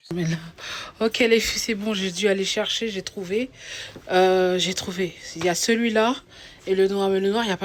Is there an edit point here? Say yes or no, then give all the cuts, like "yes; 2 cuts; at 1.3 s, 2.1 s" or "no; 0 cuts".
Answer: no; 0 cuts